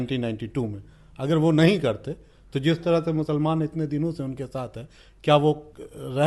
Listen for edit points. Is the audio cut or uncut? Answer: uncut